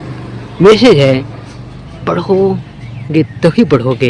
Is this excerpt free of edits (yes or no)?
yes